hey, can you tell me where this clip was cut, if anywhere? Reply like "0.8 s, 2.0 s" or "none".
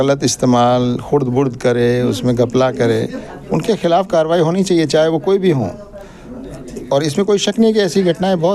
none